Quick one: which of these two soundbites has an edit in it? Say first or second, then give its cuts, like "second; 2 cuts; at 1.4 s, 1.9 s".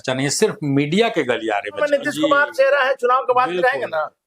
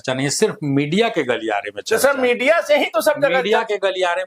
first; 1 cut; at 1.8 s